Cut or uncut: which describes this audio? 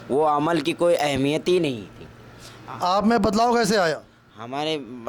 uncut